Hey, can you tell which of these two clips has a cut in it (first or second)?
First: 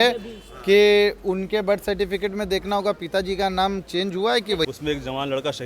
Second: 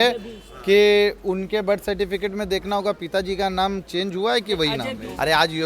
first